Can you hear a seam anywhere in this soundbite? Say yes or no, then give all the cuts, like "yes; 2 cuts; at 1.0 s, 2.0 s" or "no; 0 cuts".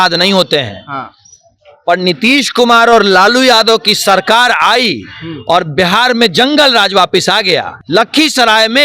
yes; 1 cut; at 7.8 s